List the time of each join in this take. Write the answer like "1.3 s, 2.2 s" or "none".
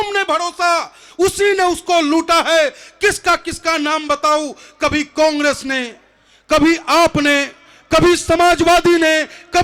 none